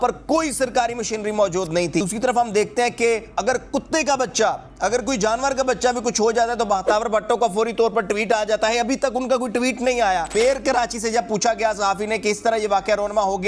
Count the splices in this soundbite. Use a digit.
2